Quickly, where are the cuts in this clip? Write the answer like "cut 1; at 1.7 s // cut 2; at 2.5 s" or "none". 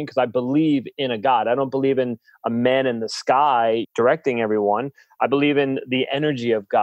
cut 1; at 3.9 s